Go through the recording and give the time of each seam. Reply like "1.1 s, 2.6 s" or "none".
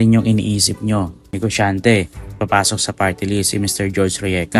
1.2 s, 2.2 s